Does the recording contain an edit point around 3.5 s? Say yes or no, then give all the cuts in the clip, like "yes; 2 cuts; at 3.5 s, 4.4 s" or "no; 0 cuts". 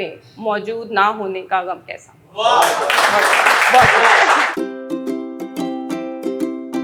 no; 0 cuts